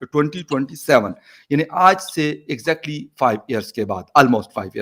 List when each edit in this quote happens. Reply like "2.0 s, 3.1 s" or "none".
none

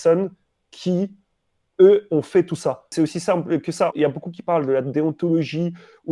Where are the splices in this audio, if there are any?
2.8 s, 3.9 s

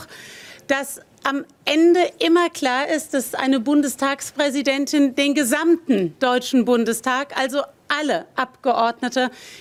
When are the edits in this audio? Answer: none

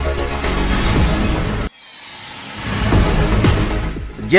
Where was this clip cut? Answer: 1.4 s, 3.1 s

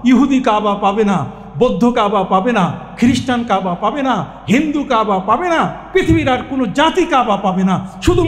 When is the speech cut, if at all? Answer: none

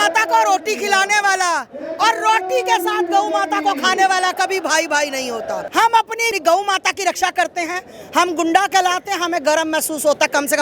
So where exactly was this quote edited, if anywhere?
5.7 s

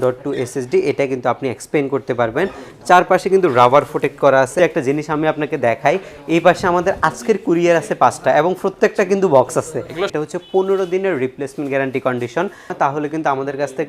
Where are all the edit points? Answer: 4.6 s, 10.1 s, 12.7 s

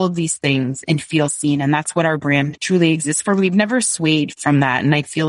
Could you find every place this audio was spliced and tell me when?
0.8 s, 2.6 s, 4.3 s

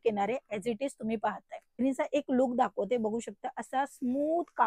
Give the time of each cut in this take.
1.8 s

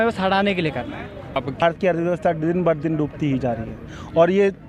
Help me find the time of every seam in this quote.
1.6 s

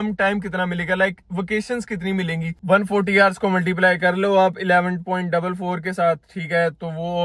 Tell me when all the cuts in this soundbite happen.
2.6 s

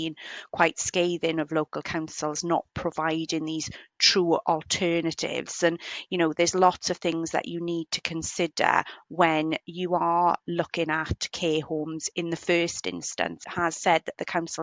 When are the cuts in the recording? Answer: 13.4 s

